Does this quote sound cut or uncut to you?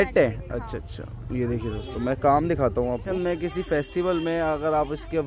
cut